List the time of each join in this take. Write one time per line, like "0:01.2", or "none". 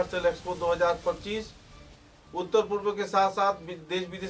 none